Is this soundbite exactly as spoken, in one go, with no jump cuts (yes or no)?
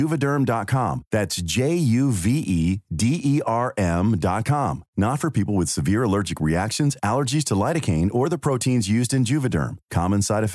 yes